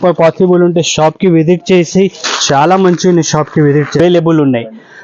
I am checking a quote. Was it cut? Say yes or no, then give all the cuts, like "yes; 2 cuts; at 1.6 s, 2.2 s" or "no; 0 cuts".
yes; 1 cut; at 4.0 s